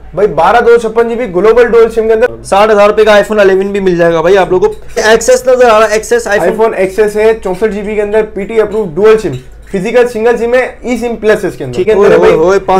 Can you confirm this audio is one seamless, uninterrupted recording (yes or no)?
no